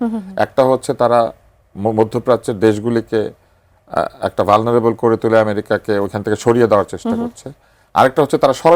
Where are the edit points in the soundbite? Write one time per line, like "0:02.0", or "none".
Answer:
none